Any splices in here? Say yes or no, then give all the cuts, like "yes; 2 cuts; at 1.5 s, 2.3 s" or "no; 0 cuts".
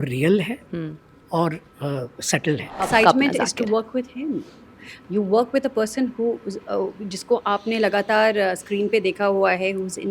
yes; 1 cut; at 2.8 s